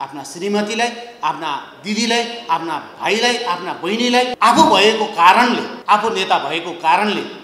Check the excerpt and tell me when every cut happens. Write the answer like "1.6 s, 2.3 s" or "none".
4.3 s, 5.7 s